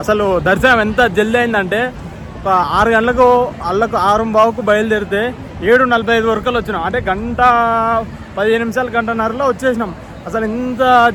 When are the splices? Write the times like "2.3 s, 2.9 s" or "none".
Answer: none